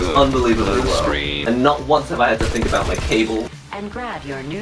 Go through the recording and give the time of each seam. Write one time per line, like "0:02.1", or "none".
0:01.3
0:03.6